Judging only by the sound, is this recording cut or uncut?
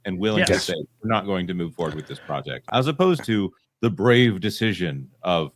cut